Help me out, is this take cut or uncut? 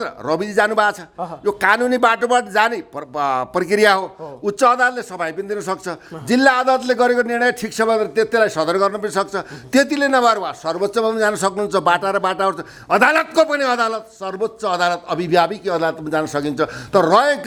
uncut